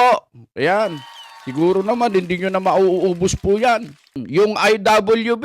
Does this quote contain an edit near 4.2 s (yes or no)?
yes